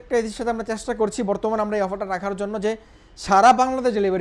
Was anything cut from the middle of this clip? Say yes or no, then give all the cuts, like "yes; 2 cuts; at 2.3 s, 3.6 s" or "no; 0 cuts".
no; 0 cuts